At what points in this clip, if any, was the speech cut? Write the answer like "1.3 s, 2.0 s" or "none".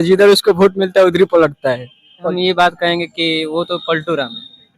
2.3 s